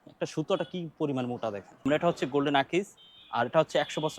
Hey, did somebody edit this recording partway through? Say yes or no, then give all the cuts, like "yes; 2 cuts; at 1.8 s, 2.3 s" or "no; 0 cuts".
yes; 1 cut; at 1.8 s